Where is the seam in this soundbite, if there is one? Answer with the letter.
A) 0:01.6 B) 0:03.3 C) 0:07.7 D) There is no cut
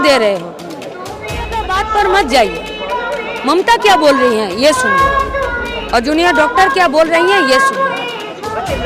A